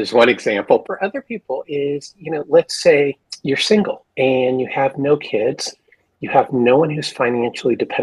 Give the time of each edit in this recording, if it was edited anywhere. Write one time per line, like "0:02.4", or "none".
0:00.8
0:03.3
0:04.0